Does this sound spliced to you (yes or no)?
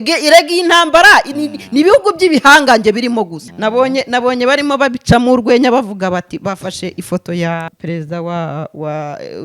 yes